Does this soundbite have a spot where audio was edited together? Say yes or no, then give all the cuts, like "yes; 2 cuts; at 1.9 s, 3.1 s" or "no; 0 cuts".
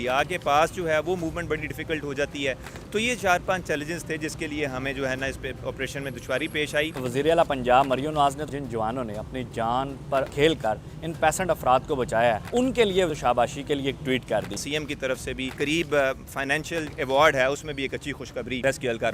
yes; 7 cuts; at 6.9 s, 8.5 s, 10.3 s, 12.9 s, 14.6 s, 15.5 s, 16.9 s